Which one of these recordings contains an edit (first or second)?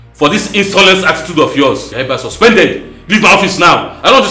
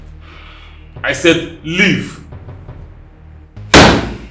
second